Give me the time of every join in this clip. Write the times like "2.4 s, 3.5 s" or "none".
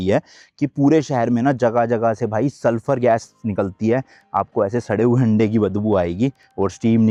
none